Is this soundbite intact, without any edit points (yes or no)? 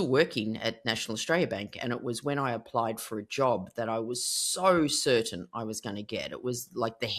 yes